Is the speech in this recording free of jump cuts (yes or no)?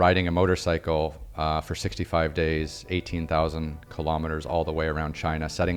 yes